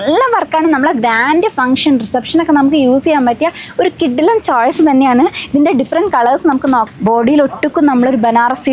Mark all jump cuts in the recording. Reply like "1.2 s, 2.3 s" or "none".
6.9 s